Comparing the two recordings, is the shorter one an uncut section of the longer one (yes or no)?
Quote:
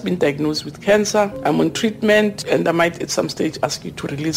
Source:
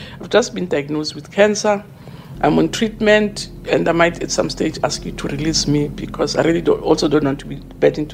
no